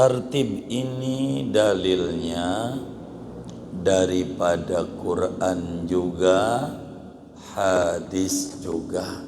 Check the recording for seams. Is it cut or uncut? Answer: uncut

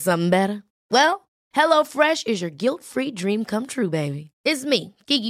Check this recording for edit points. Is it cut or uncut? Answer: uncut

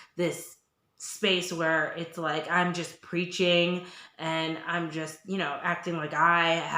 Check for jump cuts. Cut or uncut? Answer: uncut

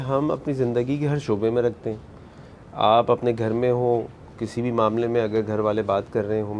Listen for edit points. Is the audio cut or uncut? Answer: uncut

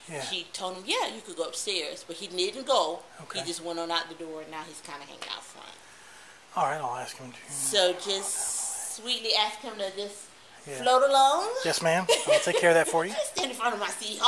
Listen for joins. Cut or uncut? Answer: cut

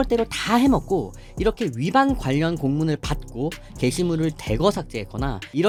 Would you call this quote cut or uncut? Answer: uncut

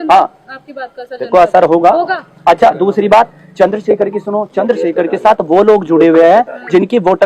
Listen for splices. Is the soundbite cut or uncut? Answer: uncut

